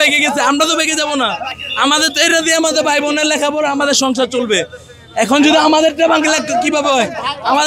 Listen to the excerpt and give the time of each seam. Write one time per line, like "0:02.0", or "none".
none